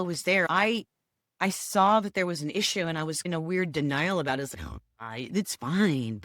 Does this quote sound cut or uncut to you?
uncut